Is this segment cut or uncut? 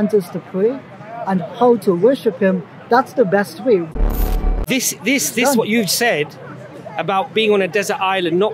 cut